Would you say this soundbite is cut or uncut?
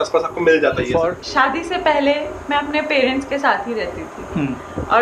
cut